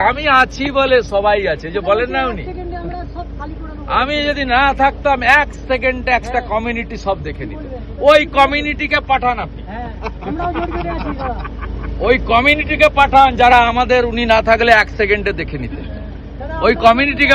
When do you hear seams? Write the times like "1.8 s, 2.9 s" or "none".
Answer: none